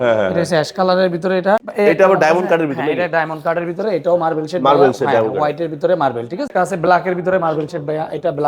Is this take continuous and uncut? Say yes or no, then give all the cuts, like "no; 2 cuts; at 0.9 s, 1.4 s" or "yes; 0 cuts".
no; 2 cuts; at 1.7 s, 6.5 s